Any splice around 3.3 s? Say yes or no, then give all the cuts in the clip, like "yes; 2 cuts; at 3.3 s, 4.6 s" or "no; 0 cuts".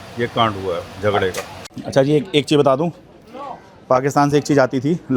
no; 1 cut; at 1.5 s